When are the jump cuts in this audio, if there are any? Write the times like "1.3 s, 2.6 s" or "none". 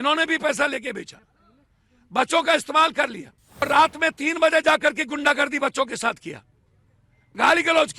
3.6 s